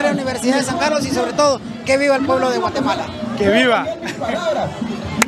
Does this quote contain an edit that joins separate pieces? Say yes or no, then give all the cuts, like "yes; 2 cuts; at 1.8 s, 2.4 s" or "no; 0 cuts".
no; 0 cuts